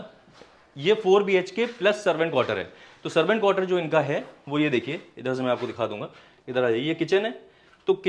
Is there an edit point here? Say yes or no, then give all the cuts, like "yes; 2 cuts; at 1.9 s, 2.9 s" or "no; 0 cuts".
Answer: no; 0 cuts